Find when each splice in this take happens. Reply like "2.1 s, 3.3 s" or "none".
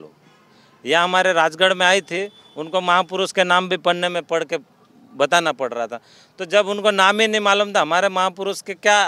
none